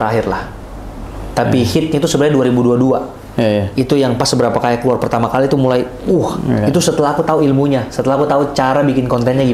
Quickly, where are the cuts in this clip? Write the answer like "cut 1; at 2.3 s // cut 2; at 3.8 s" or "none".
none